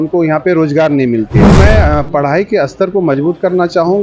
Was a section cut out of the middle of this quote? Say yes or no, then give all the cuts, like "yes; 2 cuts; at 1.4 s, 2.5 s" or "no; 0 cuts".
yes; 1 cut; at 1.5 s